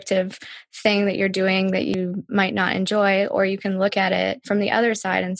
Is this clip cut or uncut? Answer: cut